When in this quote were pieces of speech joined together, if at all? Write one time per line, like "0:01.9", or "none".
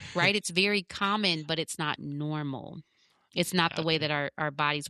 none